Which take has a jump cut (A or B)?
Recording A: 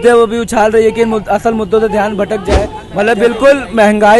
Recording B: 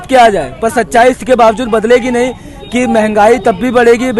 A